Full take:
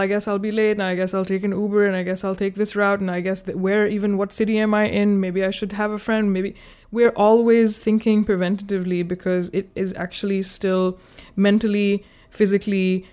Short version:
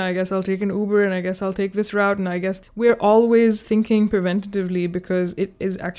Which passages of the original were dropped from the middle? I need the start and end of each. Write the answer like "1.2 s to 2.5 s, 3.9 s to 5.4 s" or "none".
3.5 s to 6.8 s